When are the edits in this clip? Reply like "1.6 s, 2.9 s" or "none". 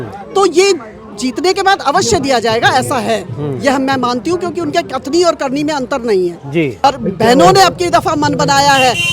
6.8 s